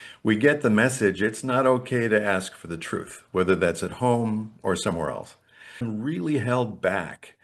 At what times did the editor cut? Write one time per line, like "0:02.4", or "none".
0:05.9